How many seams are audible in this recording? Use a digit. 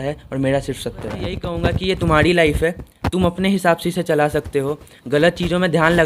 1